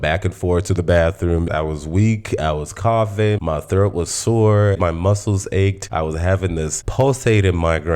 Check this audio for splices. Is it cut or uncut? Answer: cut